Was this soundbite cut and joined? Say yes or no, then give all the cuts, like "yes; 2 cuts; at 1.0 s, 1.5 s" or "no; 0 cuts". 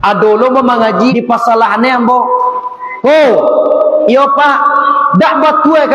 yes; 1 cut; at 1.1 s